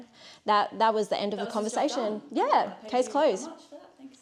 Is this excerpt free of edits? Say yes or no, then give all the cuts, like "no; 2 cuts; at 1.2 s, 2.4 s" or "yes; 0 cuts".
yes; 0 cuts